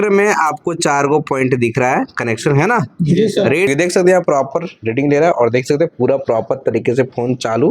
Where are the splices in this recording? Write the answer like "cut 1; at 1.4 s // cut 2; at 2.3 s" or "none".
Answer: cut 1; at 3.7 s